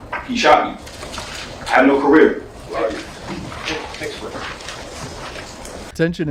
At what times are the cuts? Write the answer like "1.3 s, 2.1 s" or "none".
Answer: none